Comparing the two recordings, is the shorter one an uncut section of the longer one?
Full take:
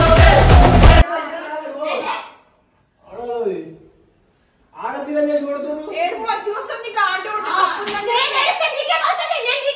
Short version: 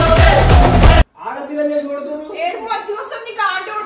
no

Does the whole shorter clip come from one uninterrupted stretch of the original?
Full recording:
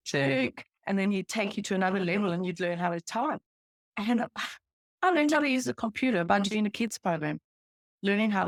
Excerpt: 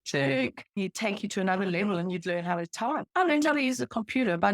no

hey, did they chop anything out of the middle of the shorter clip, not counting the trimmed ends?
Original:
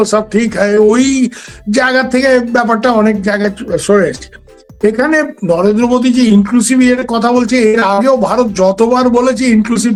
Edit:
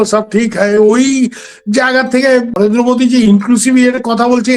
yes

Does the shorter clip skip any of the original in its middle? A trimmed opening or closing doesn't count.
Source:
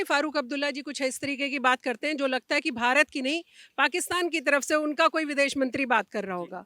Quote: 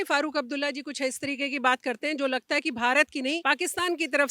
yes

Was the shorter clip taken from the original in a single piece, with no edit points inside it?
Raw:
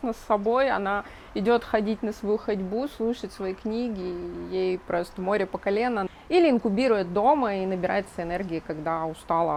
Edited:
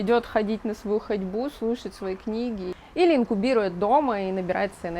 no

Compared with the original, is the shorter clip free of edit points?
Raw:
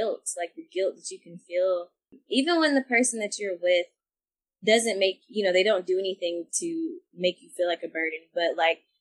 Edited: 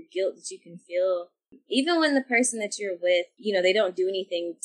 no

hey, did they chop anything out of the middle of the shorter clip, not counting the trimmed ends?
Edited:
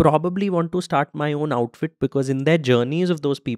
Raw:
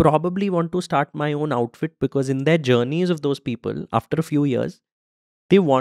no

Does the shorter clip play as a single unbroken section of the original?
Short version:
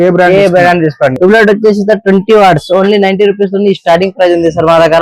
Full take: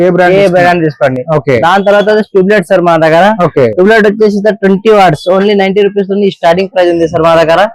no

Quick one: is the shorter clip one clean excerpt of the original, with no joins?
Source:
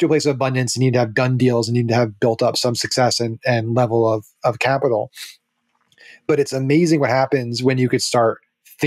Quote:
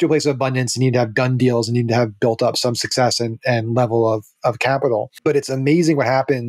no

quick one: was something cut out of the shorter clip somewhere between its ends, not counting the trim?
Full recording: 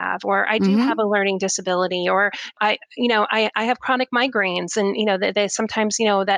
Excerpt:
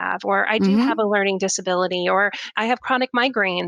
yes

